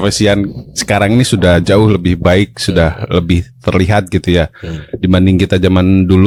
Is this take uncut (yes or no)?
yes